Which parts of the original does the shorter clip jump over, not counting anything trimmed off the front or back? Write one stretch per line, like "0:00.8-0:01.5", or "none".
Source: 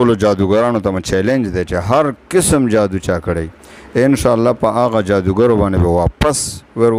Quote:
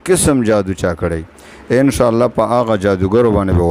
none